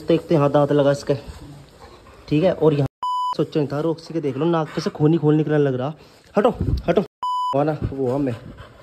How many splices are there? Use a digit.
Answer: 2